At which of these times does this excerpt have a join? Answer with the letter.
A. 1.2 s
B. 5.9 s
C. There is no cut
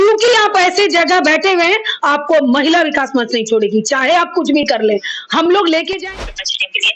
B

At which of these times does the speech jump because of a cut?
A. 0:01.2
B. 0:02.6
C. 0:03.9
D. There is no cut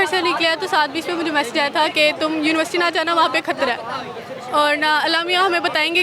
D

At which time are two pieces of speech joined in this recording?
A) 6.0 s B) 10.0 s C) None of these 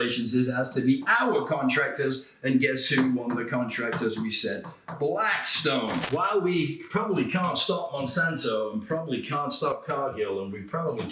A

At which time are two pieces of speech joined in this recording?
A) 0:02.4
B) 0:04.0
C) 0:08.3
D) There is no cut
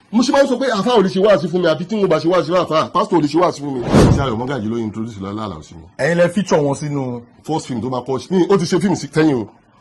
B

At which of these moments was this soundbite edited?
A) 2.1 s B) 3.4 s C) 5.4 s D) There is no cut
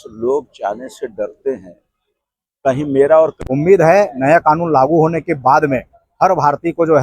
B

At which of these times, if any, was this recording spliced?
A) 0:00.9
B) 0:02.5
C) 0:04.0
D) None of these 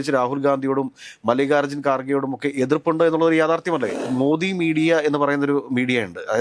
C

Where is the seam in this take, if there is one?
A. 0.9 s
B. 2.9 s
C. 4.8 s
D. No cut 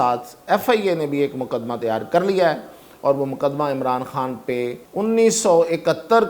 C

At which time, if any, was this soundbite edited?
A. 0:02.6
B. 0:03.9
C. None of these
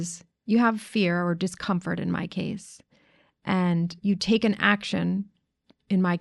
B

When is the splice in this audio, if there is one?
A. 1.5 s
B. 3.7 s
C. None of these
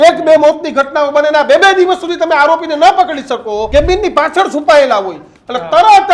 B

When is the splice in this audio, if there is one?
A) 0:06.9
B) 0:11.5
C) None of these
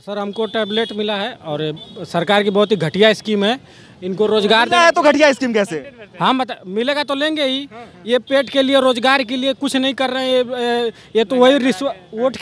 C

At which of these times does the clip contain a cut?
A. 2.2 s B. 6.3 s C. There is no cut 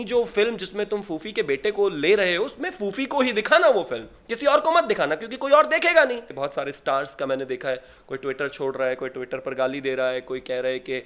B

